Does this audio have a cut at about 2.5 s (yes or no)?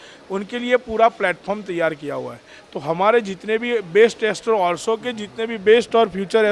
no